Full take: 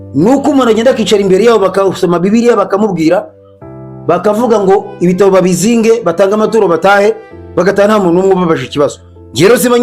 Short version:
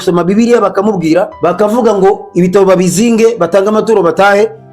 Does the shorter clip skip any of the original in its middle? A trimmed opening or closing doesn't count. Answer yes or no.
yes